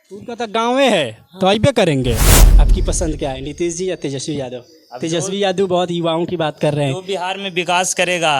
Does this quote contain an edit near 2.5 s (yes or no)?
yes